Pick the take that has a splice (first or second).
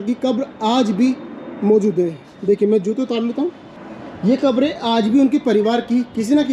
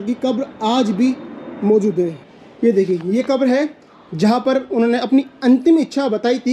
second